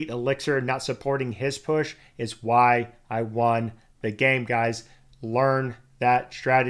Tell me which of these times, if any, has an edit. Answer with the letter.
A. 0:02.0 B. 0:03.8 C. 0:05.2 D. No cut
D